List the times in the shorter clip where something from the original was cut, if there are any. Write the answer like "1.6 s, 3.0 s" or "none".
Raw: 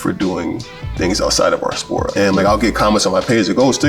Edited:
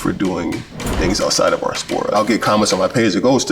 2.1 s